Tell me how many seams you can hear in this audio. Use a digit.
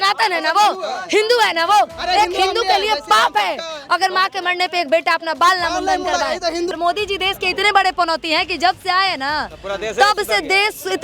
1